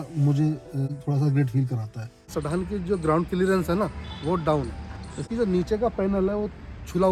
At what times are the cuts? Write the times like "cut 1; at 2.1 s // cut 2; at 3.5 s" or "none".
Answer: cut 1; at 2.3 s // cut 2; at 5.2 s